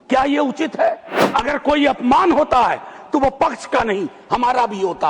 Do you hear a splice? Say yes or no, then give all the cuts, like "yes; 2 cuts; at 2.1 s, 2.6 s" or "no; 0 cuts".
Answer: yes; 1 cut; at 1.1 s